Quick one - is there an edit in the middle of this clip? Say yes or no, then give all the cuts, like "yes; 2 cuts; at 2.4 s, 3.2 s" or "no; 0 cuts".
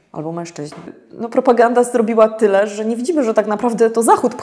yes; 1 cut; at 1.0 s